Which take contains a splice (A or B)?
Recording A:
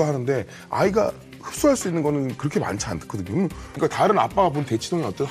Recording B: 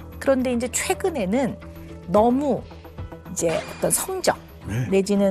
A